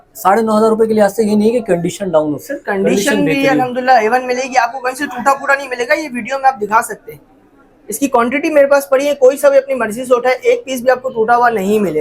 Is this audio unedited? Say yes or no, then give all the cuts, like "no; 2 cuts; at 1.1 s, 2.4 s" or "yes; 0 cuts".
yes; 0 cuts